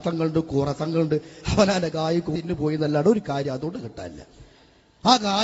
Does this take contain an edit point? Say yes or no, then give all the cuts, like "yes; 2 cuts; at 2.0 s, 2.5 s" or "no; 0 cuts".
yes; 1 cut; at 2.3 s